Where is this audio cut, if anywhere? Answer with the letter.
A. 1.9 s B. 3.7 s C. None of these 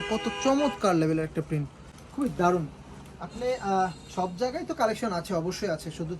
C